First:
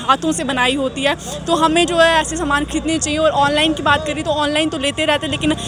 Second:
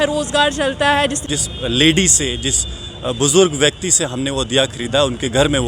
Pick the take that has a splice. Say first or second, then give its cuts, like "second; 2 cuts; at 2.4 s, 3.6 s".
second; 1 cut; at 1.2 s